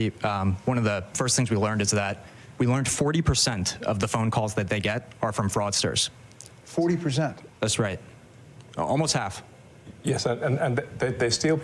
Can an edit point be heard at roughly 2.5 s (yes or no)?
yes